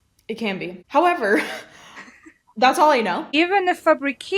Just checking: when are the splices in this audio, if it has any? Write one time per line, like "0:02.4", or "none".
0:03.2